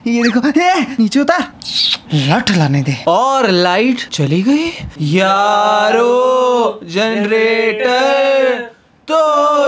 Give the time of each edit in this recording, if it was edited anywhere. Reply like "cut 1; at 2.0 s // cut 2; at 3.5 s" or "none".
none